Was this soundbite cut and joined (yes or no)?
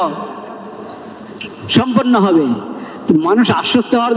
yes